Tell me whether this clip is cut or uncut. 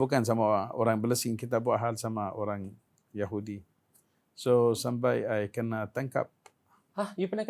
uncut